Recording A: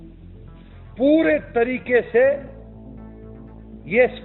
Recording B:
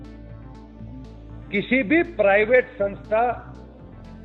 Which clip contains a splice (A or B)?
A